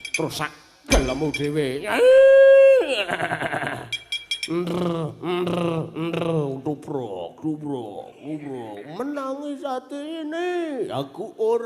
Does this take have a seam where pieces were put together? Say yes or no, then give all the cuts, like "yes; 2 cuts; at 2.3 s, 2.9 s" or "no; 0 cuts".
yes; 1 cut; at 4.7 s